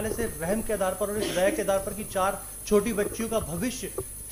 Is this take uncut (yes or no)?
yes